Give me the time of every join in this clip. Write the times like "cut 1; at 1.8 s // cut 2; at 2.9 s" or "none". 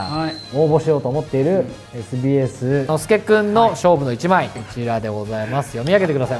cut 1; at 3.0 s // cut 2; at 4.6 s